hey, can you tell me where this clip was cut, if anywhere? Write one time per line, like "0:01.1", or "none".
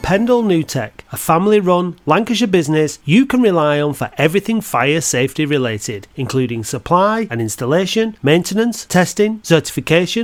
none